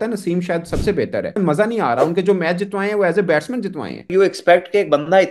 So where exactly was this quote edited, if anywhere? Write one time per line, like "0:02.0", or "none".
0:01.4
0:04.1

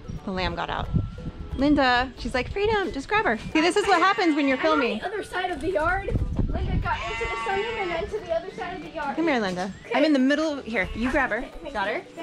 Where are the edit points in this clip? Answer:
0:01.4
0:02.2
0:03.4
0:09.9

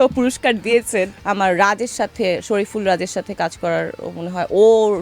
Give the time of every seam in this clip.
0:01.2

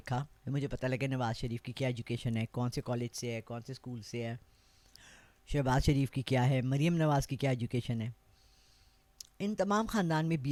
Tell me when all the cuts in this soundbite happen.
none

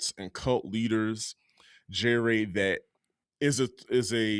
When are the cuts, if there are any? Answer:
none

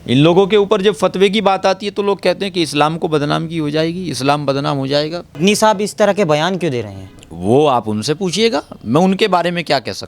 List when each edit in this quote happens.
0:05.3

